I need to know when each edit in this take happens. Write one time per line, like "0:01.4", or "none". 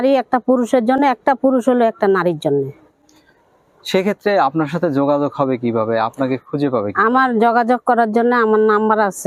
none